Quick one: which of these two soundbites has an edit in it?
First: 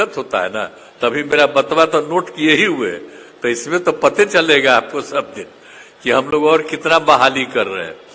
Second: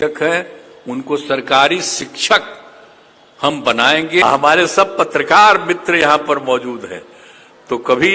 second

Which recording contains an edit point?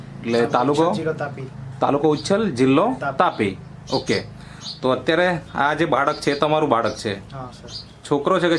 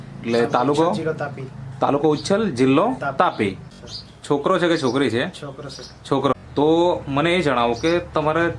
second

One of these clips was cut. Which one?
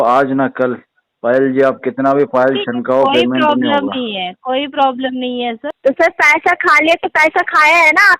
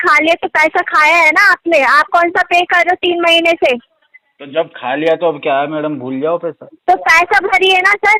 first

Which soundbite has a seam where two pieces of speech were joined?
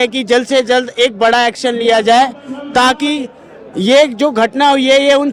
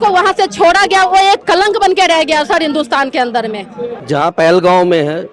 second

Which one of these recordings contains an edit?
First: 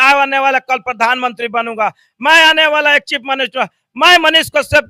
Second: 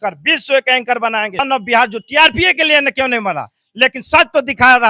second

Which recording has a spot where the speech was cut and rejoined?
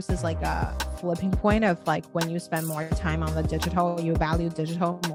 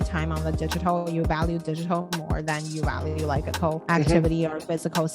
second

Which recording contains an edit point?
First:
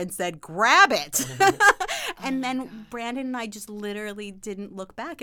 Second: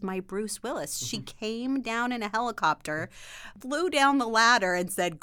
second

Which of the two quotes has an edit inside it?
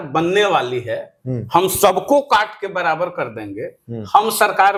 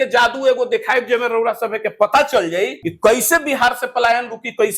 second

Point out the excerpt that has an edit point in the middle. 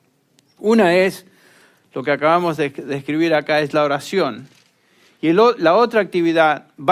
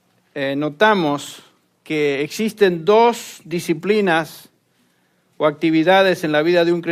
second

